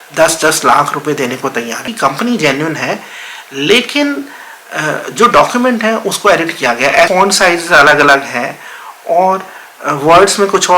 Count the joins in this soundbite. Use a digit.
2